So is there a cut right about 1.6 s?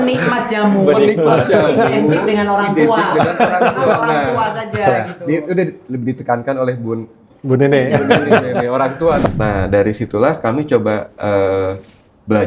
no; 1 cut; at 9.2 s

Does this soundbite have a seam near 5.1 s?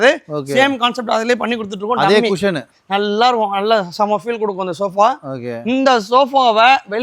no; 0 cuts

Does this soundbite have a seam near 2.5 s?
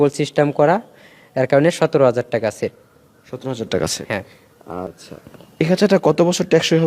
no; 1 cut; at 5.0 s

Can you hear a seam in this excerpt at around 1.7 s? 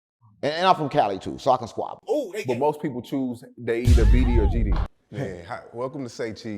no; 1 cut; at 4.9 s

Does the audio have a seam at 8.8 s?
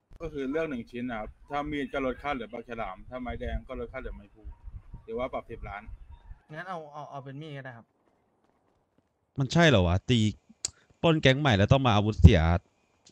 yes; 1 cut; at 8.8 s

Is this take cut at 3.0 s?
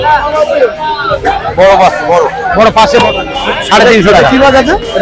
yes; 1 cut; at 3.0 s

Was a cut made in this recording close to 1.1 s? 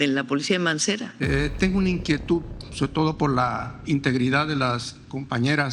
yes; 1 cut; at 1.1 s

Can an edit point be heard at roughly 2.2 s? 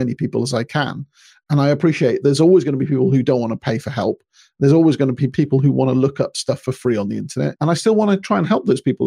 yes; 3 cuts; at 2.2 s, 5.2 s, 7.5 s

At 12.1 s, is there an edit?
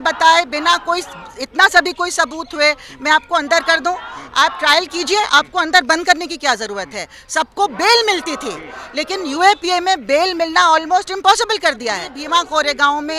yes; 1 cut; at 12.1 s

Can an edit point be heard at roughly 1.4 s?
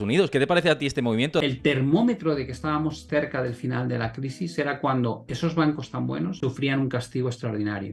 yes; 1 cut; at 1.4 s

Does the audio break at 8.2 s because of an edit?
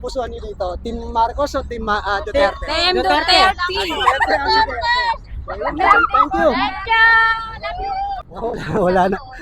yes; 1 cut; at 8.2 s

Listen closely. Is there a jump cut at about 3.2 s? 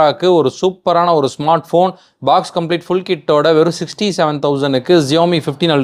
no; 0 cuts

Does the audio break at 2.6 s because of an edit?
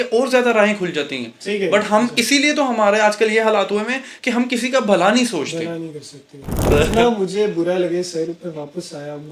no; 1 cut; at 6.7 s

